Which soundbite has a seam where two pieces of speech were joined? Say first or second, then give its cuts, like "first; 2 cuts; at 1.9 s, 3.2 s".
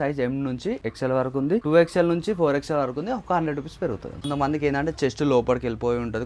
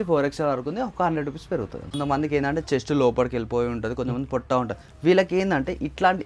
first; 1 cut; at 1.3 s